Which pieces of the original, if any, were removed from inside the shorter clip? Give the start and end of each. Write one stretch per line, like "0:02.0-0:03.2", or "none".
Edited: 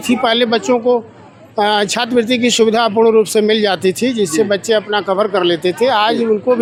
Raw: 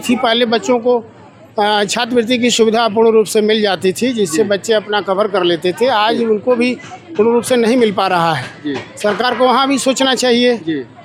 none